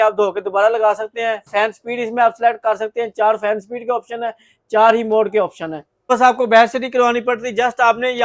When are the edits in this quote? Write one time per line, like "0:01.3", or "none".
0:06.1